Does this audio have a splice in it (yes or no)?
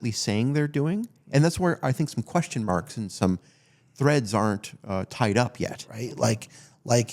yes